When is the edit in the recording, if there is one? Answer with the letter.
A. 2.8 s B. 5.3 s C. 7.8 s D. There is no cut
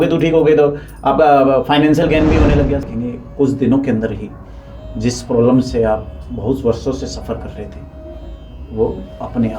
A